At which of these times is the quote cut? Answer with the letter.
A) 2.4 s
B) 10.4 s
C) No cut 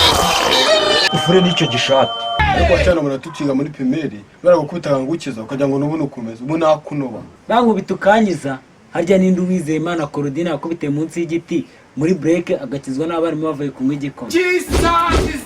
A